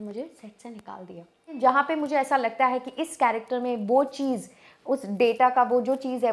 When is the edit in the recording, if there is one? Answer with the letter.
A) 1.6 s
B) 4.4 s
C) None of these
A